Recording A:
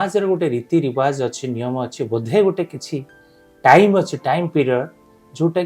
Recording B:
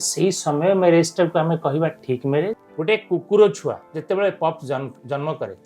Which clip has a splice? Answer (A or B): B